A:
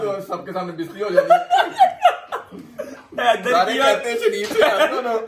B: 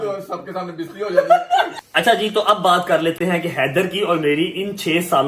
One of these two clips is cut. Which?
B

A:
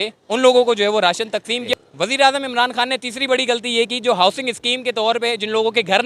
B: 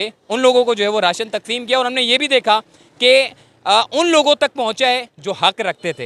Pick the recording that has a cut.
A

